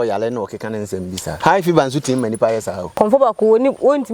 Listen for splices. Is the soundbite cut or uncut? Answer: cut